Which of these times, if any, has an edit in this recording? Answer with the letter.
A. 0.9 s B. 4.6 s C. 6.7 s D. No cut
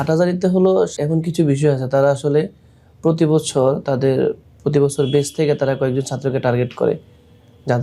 A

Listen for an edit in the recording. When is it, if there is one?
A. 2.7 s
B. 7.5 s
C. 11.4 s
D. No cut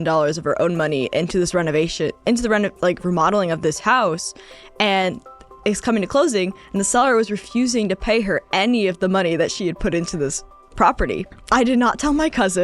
C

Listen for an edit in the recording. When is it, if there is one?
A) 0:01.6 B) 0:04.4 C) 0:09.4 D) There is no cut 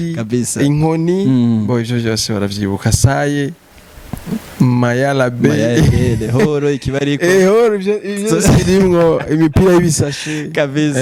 D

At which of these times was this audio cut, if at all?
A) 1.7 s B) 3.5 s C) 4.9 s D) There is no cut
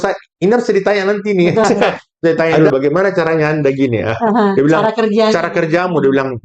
A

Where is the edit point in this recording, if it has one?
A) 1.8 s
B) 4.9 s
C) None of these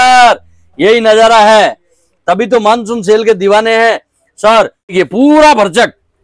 B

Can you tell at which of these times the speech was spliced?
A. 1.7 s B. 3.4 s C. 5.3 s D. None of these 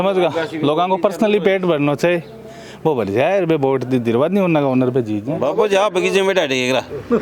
C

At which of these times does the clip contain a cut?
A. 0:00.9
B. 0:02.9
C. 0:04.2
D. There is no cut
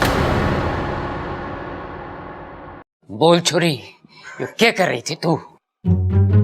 B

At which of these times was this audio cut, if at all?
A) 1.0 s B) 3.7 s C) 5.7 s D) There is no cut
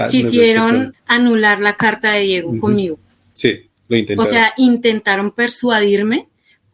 A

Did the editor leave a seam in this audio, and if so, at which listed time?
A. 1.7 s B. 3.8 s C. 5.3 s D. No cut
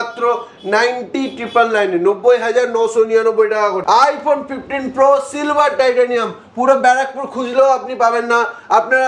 B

